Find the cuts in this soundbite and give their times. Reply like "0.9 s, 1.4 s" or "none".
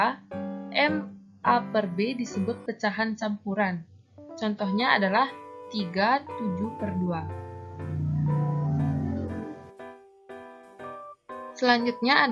9.6 s, 11.4 s